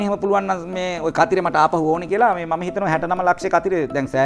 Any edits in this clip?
no; 0 cuts

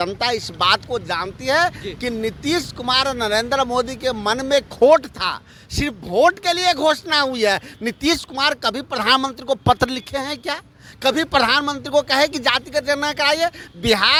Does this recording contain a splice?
no; 0 cuts

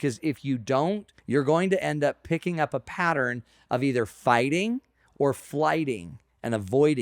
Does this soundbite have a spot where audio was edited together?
yes; 2 cuts; at 1.1 s, 5.0 s

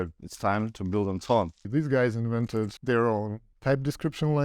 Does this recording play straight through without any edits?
no; 3 cuts; at 1.7 s, 2.8 s, 3.4 s

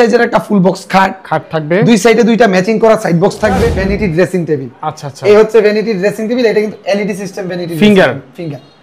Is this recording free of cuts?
no; 1 cut; at 3.7 s

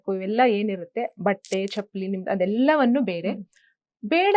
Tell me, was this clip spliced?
no; 0 cuts

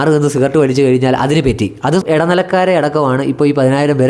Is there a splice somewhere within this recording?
yes; 1 cut; at 2.0 s

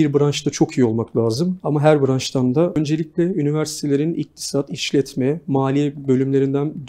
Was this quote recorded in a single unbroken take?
no; 2 cuts; at 1.6 s, 2.8 s

